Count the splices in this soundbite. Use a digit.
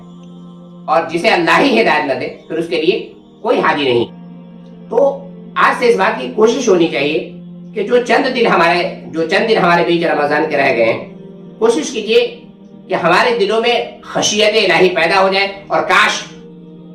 1